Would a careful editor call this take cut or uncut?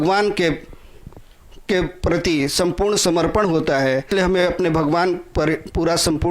cut